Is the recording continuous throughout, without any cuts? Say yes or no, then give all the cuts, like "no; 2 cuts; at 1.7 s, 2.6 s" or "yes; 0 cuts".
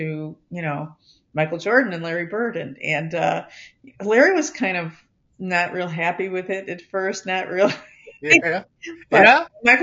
yes; 0 cuts